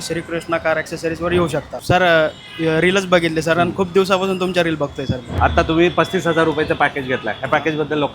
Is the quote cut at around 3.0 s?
no; 2 cuts; at 1.7 s, 5.2 s

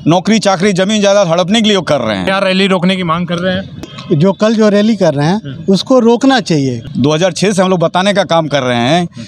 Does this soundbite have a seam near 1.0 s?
no; 3 cuts; at 2.3 s, 3.9 s, 6.8 s

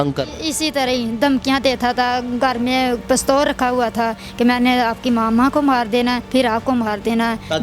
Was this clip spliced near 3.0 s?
yes; 2 cuts; at 3.0 s, 6.2 s

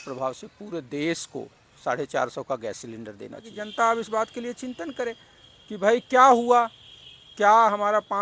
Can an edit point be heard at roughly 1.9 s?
no; 1 cut; at 3.6 s

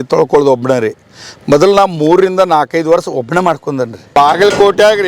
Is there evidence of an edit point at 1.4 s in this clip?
no; 1 cut; at 4.1 s

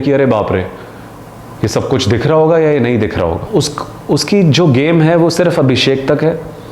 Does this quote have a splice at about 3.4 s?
yes; 1 cut; at 3.4 s

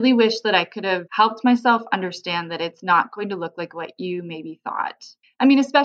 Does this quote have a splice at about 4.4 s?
no; 1 cut; at 1.0 s

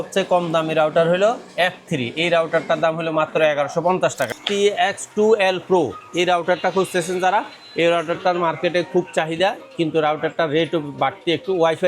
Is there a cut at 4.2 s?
yes; 1 cut; at 4.2 s

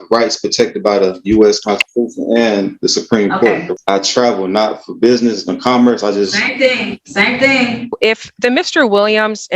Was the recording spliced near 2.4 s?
no; 2 cuts; at 3.7 s, 8.0 s

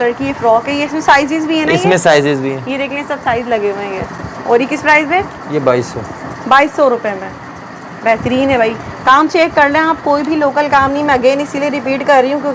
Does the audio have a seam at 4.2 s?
no; 0 cuts

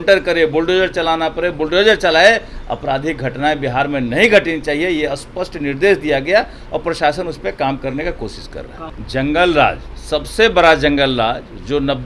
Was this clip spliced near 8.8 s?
yes; 1 cut; at 8.8 s

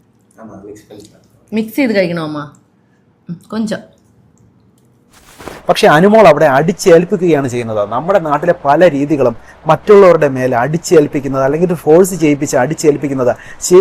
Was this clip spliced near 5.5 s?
yes; 1 cut; at 5.5 s

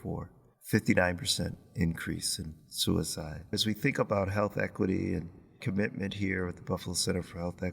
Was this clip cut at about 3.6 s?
yes; 1 cut; at 3.6 s

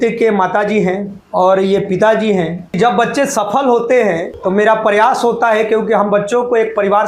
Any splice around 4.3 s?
yes; 3 cuts; at 1.1 s, 2.8 s, 4.3 s

